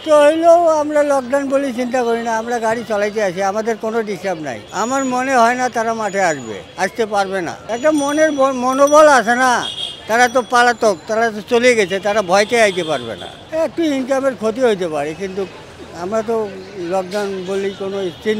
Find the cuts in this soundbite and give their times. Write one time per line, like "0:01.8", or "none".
none

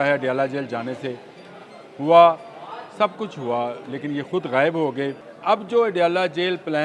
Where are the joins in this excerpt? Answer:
0:05.3

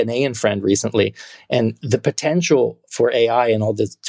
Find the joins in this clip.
0:01.8

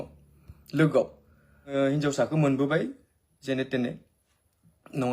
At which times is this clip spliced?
0:01.7

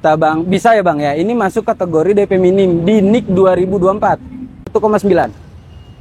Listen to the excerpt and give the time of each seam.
0:04.7

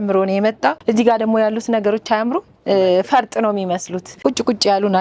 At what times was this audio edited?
0:00.8
0:04.1

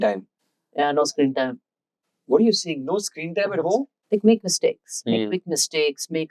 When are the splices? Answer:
0:04.0

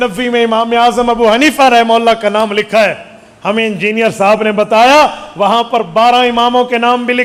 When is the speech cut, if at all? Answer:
none

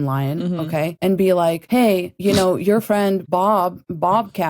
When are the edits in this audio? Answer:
0:00.9
0:02.0
0:03.4

